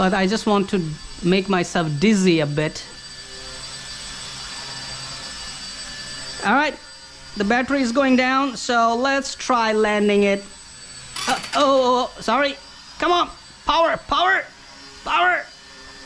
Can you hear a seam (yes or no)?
no